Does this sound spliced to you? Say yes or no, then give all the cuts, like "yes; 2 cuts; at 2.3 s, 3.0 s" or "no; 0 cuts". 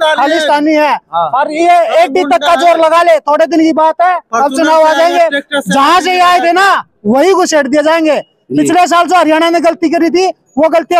no; 0 cuts